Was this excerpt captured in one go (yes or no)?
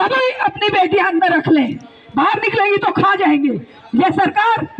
yes